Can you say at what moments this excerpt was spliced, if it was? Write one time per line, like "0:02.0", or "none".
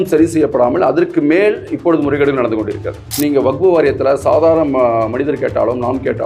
0:03.0